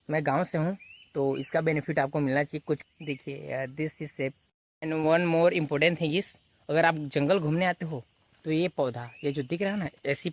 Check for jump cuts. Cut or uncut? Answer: cut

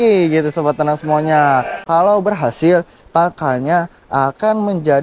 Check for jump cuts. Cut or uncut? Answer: cut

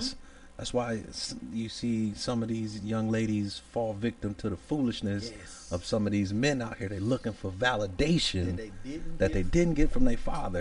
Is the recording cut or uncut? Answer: uncut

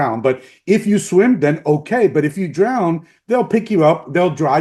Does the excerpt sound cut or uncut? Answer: uncut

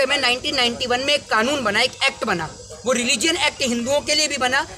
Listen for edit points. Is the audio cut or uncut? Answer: uncut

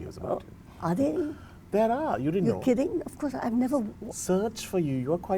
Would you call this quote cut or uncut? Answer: uncut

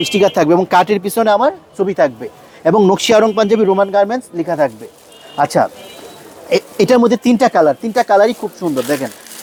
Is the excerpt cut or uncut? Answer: uncut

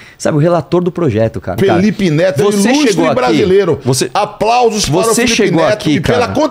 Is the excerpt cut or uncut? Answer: cut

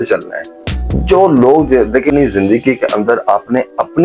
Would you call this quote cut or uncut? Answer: cut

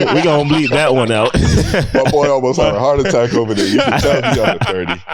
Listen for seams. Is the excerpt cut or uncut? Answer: uncut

